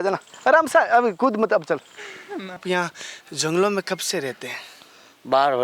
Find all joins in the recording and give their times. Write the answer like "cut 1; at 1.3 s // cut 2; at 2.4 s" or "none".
cut 1; at 2.5 s